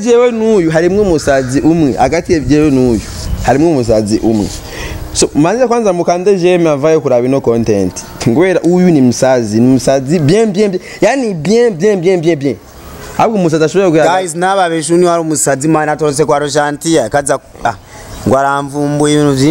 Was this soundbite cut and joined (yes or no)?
no